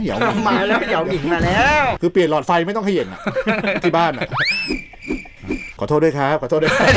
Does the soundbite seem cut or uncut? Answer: uncut